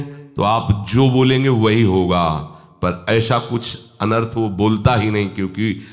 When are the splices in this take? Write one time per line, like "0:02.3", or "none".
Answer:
none